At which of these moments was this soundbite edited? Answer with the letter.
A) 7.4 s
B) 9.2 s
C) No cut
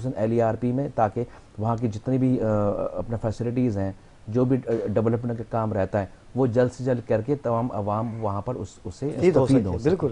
B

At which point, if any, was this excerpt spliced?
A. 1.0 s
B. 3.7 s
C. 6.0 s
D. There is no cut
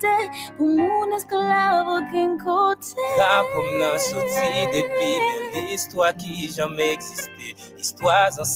D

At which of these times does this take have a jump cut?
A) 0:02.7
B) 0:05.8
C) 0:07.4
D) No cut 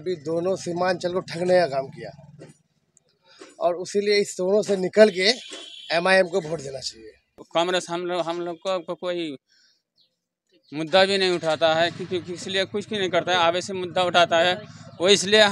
C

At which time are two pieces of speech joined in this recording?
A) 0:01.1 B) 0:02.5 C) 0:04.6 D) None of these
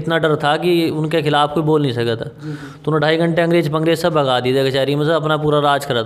D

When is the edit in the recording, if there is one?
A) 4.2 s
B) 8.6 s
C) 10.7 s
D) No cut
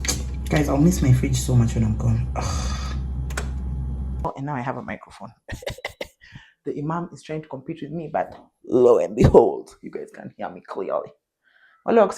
A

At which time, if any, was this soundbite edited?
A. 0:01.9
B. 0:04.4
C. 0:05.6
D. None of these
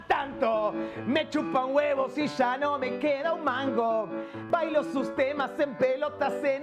B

